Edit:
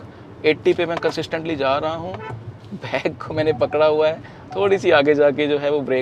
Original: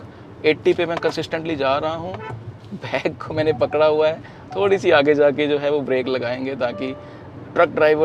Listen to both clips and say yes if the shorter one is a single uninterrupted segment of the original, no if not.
yes